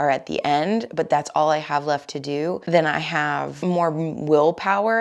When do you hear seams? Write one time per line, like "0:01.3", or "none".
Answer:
0:02.6
0:03.6